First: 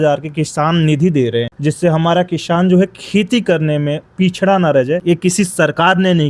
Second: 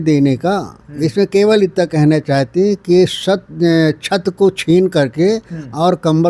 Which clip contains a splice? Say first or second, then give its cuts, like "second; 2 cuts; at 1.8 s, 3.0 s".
first; 2 cuts; at 1.5 s, 5.0 s